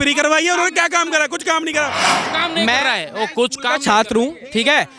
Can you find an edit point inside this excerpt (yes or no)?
no